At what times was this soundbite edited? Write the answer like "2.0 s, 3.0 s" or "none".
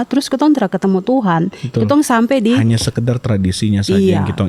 none